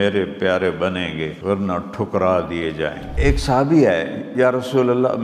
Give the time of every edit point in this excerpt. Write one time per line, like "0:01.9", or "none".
0:01.3
0:03.1